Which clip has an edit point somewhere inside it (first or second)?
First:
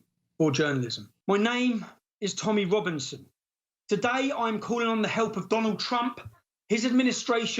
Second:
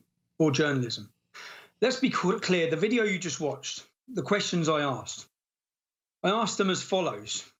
first